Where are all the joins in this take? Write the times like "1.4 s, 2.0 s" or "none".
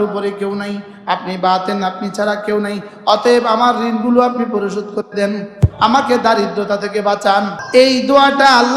7.6 s

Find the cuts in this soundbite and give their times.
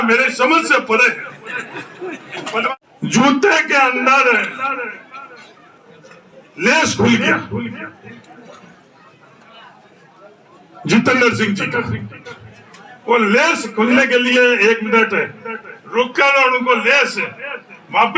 2.7 s

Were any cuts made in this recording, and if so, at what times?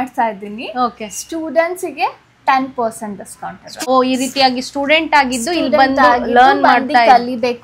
3.9 s

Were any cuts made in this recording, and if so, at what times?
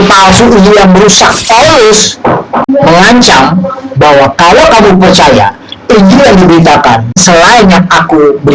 1.4 s, 2.6 s, 7.2 s

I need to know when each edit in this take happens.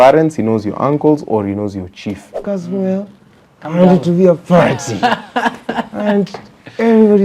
2.4 s

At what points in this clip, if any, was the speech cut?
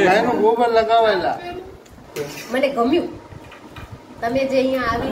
2.0 s

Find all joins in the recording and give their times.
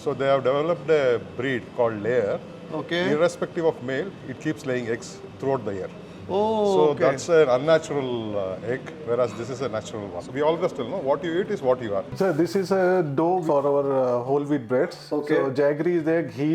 6.1 s, 10.2 s, 12.1 s, 13.4 s

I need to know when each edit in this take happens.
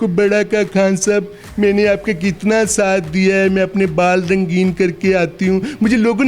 none

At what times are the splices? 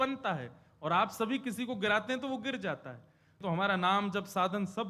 3.4 s

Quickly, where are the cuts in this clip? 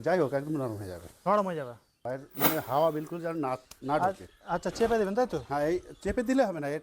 2.0 s

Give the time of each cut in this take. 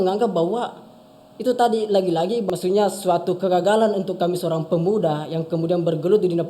2.5 s

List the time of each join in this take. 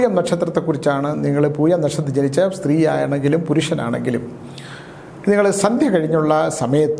none

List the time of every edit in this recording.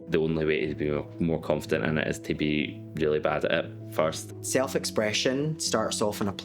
4.1 s

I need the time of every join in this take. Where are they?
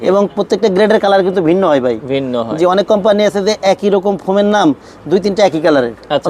none

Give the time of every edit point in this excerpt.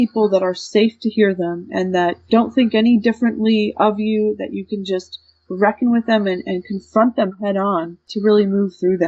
2.2 s, 8.1 s

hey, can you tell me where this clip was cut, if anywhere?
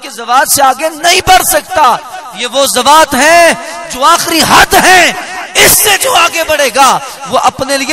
none

